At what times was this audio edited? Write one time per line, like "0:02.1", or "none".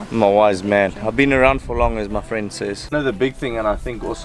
0:02.8

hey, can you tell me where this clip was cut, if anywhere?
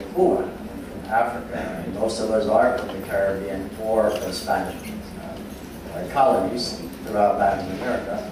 none

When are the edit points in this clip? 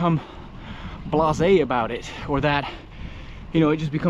none

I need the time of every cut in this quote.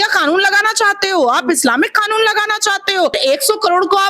0:03.2

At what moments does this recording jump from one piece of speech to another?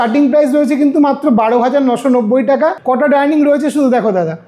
0:02.8

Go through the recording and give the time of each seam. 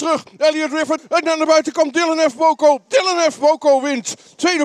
0:01.0

